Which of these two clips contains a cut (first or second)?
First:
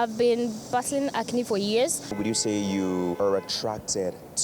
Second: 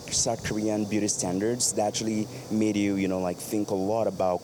first